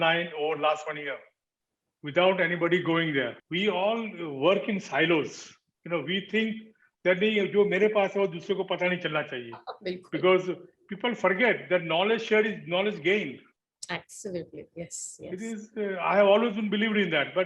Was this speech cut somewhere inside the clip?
yes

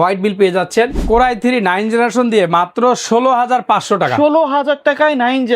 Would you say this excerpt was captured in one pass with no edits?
no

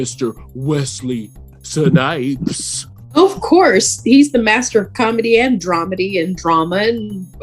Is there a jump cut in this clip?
no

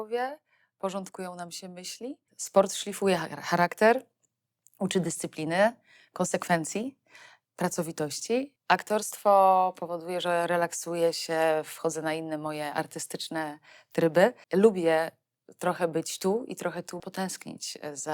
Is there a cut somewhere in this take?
yes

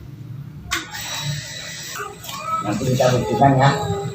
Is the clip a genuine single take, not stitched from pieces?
no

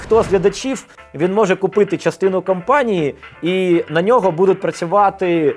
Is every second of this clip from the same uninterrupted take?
yes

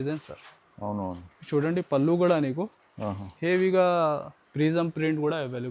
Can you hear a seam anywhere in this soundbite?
no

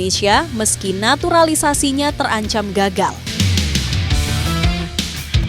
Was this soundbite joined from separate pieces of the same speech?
yes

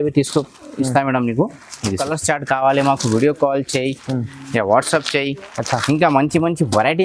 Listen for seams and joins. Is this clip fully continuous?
no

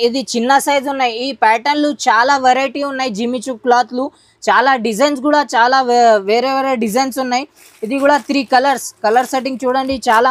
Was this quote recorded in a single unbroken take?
yes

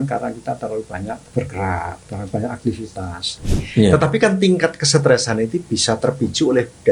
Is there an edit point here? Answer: yes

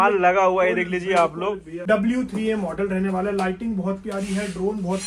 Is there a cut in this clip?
yes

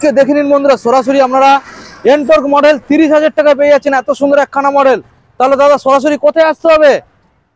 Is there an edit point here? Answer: no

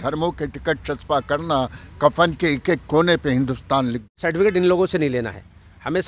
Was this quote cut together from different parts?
yes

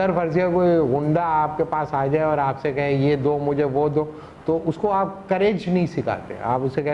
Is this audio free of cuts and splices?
yes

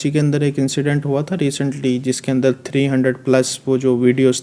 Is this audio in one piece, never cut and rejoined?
yes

